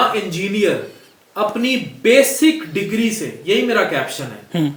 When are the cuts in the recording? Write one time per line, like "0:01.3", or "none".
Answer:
none